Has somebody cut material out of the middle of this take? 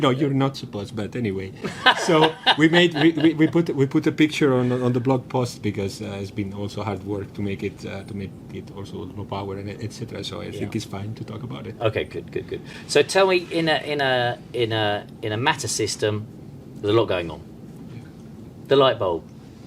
no; 0 cuts

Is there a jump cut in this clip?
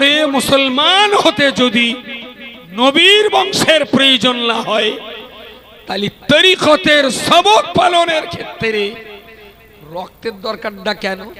no; 0 cuts

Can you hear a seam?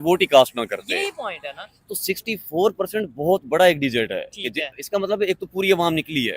no; 0 cuts

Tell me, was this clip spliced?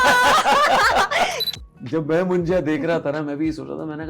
yes; 1 cut; at 1.5 s

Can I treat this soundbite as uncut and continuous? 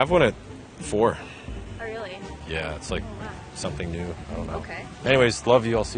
no; 1 cut; at 2.3 s

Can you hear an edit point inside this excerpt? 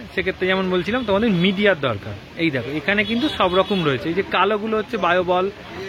no; 0 cuts

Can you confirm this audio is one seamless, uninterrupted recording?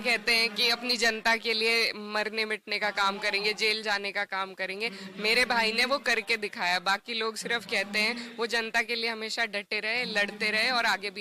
yes; 0 cuts

